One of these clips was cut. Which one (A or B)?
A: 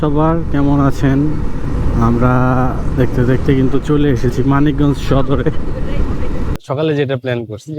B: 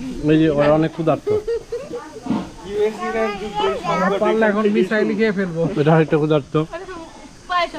A